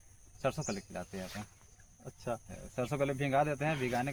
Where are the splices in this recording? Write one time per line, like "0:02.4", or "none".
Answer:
none